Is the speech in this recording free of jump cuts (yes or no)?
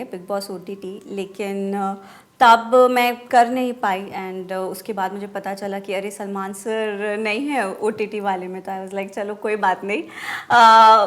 yes